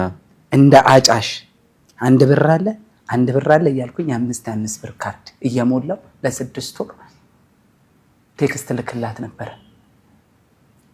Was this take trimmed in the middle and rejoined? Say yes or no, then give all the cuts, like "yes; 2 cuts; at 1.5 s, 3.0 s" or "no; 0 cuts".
no; 0 cuts